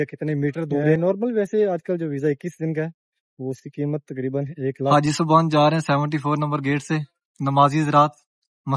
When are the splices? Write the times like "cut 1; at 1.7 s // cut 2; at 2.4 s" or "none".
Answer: cut 1; at 1.0 s // cut 2; at 4.9 s